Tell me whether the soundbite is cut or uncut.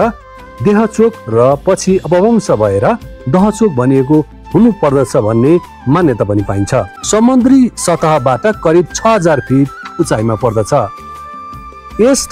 cut